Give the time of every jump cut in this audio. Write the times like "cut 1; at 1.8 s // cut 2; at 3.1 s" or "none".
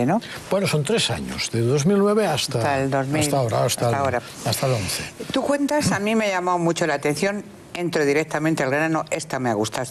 cut 1; at 6.8 s